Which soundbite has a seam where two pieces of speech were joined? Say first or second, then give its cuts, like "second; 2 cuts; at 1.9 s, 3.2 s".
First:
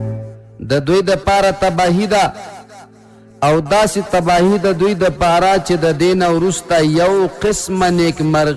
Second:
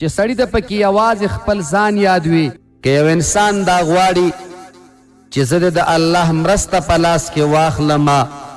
second; 1 cut; at 2.7 s